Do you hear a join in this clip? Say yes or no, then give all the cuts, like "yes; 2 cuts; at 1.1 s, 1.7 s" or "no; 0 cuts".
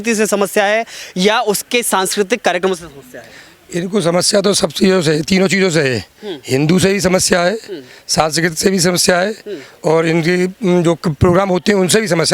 no; 0 cuts